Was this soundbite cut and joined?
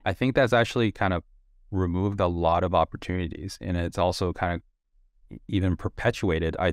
no; 0 cuts

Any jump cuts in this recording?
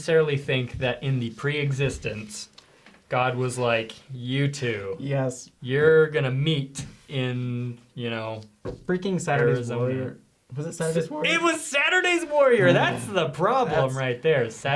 no; 0 cuts

